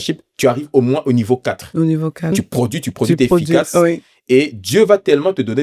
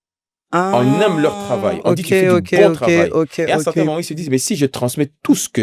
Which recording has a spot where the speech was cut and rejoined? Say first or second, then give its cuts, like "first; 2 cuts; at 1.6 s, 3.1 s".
first; 1 cut; at 2.3 s